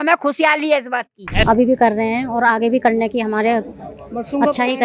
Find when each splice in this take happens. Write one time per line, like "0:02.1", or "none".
0:01.4